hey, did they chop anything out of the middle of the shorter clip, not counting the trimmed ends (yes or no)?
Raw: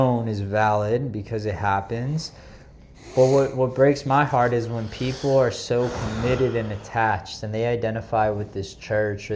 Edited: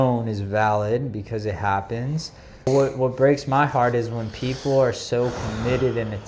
yes